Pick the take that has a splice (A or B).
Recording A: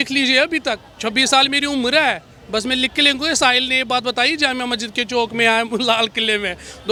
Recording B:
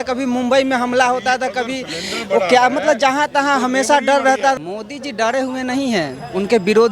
B